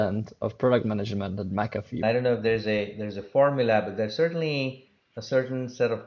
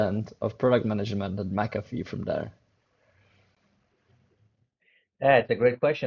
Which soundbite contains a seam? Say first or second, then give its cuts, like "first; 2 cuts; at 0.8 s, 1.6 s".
first; 1 cut; at 2.0 s